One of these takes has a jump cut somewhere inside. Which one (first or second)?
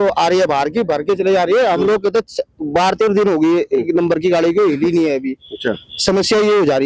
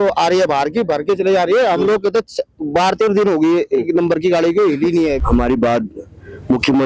second